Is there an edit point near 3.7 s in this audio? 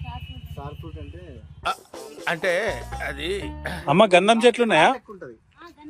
yes; 1 cut; at 3.7 s

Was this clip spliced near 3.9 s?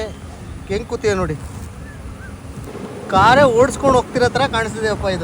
no; 1 cut; at 2.7 s

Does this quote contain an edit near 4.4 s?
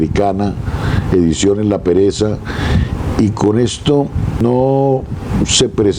yes; 1 cut; at 4.4 s

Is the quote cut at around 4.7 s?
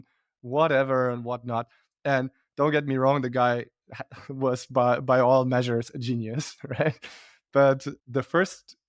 no; 0 cuts

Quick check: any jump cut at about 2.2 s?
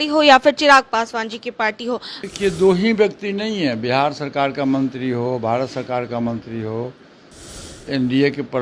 yes; 1 cut; at 2.2 s

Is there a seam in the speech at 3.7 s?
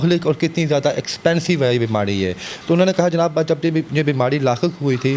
no; 0 cuts

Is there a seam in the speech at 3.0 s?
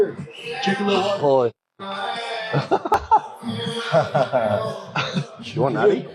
yes; 1 cut; at 3.0 s

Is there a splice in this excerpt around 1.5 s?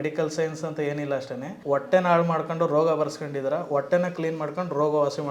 yes; 1 cut; at 1.5 s

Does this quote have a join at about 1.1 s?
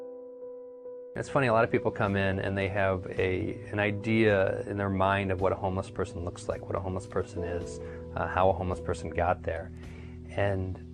yes; 1 cut; at 1.1 s

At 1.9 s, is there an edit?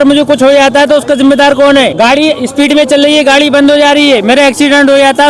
yes; 1 cut; at 1.9 s

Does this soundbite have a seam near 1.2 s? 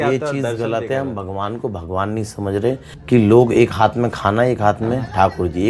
no; 1 cut; at 2.9 s

